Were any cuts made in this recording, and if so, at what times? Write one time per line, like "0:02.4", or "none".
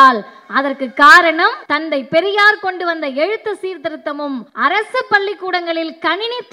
0:01.6
0:04.5